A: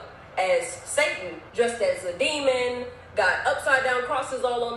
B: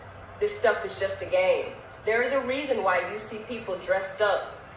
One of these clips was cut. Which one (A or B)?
A